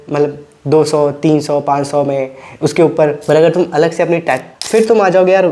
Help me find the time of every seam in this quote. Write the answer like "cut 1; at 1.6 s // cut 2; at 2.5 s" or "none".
cut 1; at 4.5 s